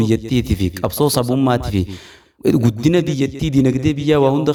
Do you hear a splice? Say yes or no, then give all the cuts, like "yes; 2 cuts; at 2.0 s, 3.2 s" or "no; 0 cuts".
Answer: no; 0 cuts